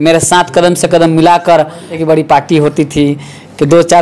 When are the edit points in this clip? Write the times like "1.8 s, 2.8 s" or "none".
2.0 s